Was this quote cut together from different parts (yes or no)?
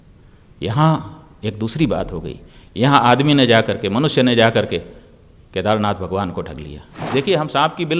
yes